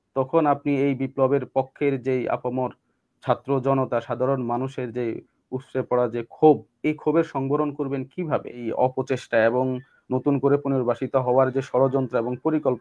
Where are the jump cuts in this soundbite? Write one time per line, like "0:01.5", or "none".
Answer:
0:08.6